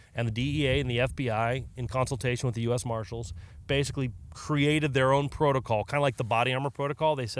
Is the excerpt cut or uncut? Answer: uncut